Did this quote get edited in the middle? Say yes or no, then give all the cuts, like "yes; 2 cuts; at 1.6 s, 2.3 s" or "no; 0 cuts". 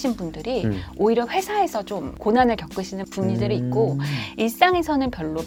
no; 0 cuts